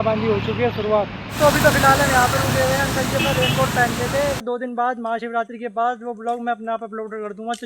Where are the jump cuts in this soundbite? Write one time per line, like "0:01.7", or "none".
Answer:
0:04.4